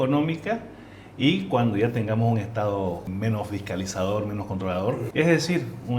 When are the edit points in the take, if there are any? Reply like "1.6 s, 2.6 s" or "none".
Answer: 3.0 s, 5.1 s